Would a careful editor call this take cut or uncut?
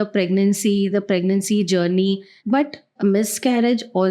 cut